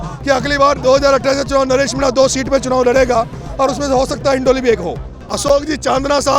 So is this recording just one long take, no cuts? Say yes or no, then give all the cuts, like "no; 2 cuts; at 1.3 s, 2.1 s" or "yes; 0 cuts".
no; 1 cut; at 5.5 s